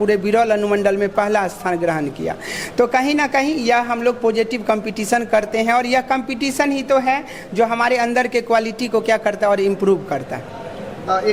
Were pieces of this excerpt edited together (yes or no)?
no